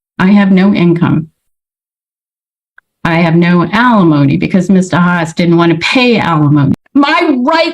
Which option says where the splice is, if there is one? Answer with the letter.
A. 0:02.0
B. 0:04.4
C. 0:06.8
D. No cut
C